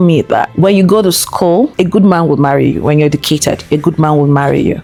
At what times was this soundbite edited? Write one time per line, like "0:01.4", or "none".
none